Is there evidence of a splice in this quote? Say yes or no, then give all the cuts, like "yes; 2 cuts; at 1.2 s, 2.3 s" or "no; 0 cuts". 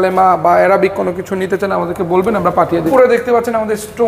yes; 1 cut; at 2.9 s